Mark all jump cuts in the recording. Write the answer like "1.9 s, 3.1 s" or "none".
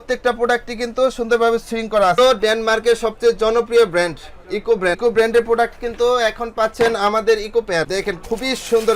2.1 s, 5.0 s, 7.9 s

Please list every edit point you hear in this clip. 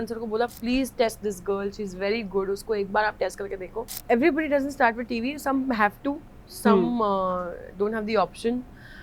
3.9 s

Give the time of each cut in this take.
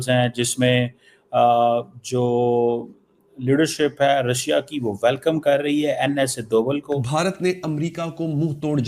7.0 s

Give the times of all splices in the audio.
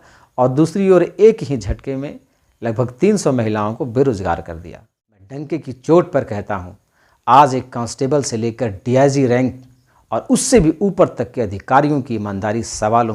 5.4 s

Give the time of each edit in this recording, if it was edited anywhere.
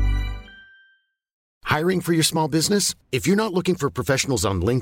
1.5 s

